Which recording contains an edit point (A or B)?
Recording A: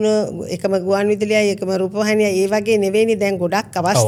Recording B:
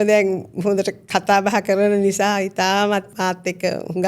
B